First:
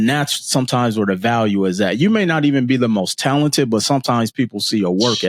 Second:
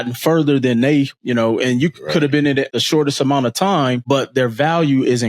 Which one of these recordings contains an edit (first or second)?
second